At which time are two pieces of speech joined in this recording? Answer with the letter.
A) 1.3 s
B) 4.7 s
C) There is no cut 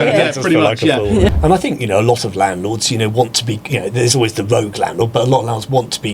A